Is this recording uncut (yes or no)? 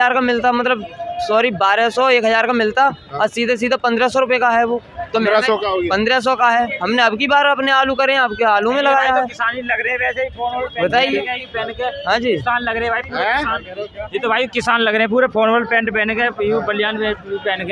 yes